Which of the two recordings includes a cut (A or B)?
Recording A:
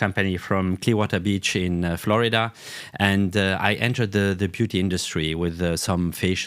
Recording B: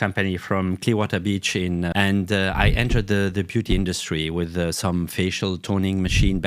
B